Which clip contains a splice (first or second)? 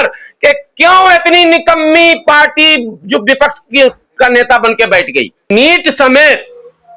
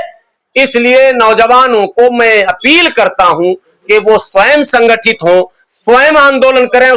first